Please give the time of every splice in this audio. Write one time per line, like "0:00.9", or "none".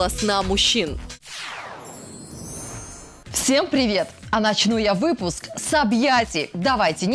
0:01.1
0:03.1